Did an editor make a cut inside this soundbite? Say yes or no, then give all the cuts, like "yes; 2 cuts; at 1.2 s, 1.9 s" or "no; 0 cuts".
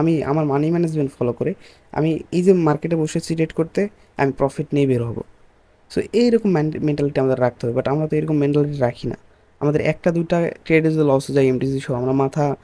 no; 0 cuts